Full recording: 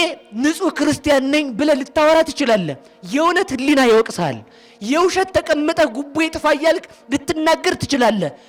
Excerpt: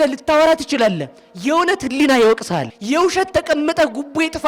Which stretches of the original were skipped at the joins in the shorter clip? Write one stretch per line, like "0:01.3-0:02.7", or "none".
0:04.4-0:04.7